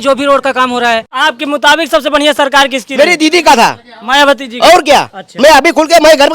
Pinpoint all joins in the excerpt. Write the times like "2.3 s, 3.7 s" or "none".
1.1 s